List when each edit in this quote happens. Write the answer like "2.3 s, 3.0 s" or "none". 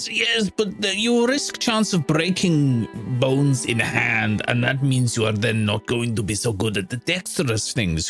none